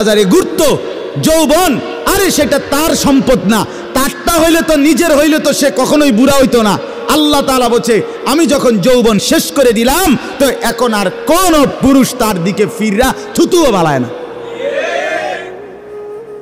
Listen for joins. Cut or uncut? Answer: cut